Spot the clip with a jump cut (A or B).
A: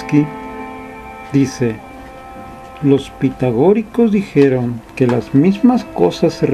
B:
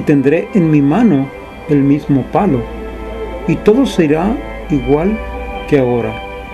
A